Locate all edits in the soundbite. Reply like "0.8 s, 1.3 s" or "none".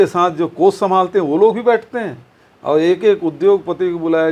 none